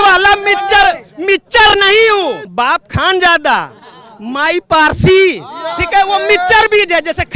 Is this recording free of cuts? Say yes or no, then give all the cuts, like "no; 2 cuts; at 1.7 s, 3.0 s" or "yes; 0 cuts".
no; 1 cut; at 2.4 s